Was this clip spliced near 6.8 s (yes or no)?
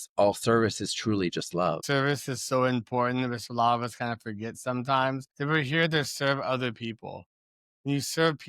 no